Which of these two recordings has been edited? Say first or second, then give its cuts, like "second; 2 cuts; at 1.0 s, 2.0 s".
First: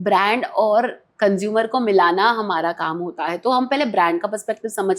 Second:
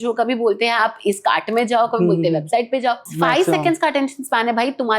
second; 1 cut; at 3.1 s